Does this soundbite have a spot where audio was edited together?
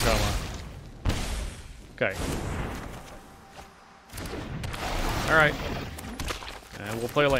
no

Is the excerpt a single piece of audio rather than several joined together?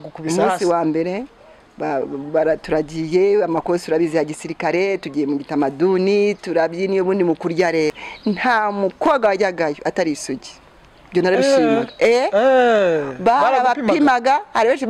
no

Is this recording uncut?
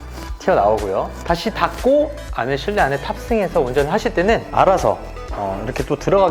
no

